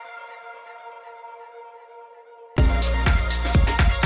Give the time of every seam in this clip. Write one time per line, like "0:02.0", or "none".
0:01.7
0:02.4